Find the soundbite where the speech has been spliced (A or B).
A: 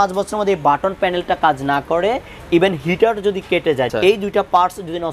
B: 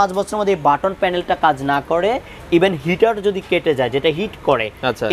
A